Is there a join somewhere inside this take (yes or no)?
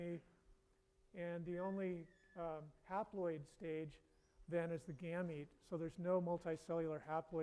yes